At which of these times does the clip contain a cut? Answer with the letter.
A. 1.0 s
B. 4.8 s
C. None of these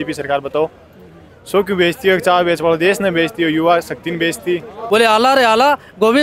B